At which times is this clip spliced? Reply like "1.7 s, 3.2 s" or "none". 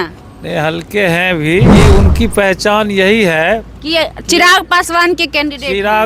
1.7 s